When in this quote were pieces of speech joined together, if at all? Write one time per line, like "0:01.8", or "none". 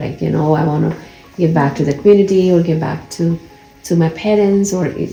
none